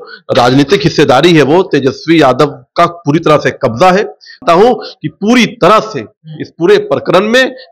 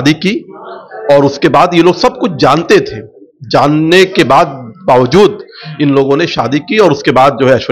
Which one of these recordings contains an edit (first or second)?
first